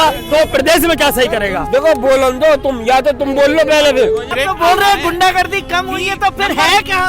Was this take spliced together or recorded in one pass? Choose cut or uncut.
cut